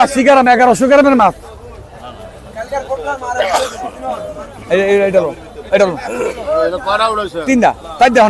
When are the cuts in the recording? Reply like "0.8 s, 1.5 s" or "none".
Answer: none